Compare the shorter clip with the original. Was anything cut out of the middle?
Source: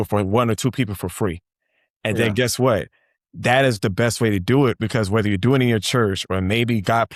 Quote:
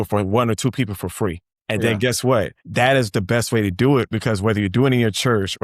yes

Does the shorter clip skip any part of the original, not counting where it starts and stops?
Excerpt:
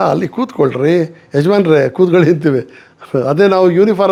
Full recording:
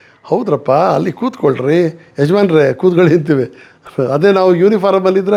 no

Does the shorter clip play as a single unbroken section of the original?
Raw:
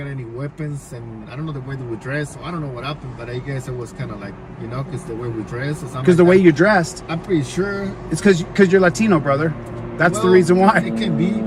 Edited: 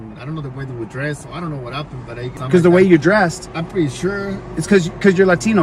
no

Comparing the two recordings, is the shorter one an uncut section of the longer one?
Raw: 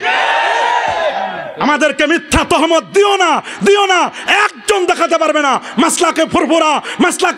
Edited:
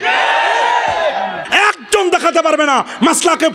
no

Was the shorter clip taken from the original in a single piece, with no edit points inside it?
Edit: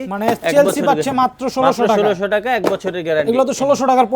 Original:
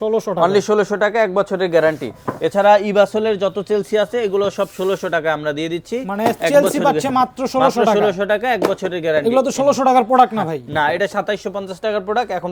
yes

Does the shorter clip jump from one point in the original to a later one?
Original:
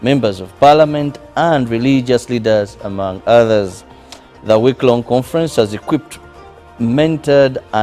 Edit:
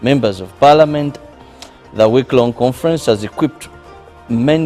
yes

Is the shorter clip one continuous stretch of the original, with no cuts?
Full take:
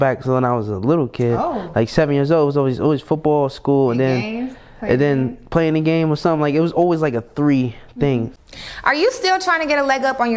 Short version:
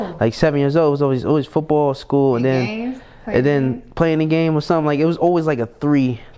yes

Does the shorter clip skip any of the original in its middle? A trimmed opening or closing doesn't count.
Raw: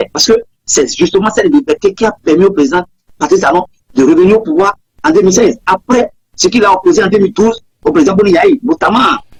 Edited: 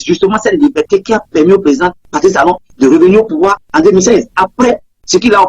yes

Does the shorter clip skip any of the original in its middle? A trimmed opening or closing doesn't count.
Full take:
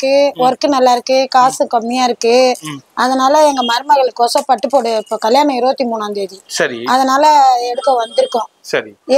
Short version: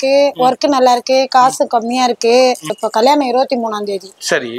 yes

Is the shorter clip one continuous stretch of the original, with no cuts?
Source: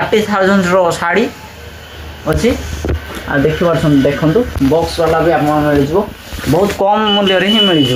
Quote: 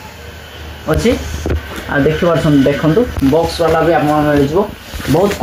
yes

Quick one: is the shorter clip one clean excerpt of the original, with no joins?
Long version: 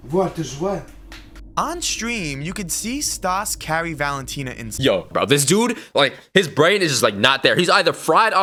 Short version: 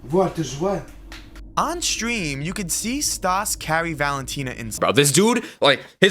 no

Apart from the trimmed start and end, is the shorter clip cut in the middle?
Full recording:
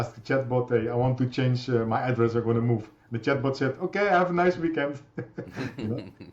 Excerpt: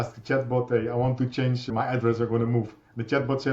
yes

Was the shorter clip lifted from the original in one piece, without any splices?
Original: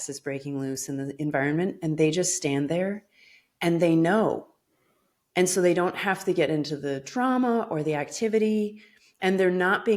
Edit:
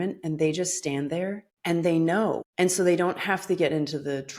no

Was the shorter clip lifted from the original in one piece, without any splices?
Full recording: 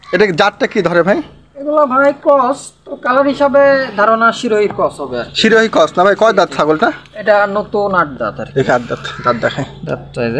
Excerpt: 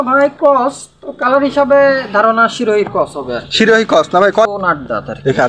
no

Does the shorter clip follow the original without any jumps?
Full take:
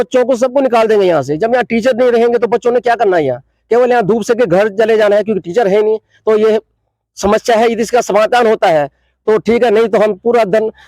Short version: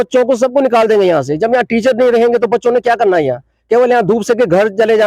yes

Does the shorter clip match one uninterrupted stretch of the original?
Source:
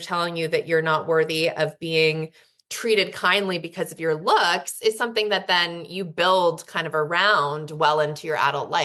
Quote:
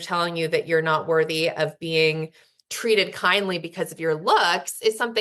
yes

